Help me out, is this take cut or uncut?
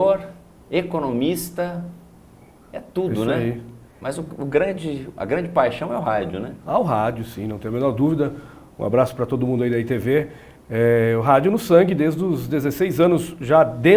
cut